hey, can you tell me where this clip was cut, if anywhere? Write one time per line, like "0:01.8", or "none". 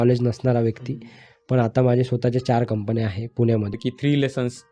0:03.8